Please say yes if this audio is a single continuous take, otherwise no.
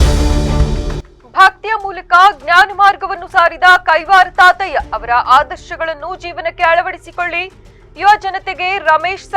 no